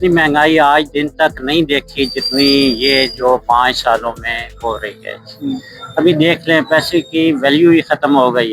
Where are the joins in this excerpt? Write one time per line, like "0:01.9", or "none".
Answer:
none